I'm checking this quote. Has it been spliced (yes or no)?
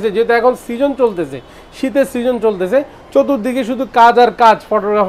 no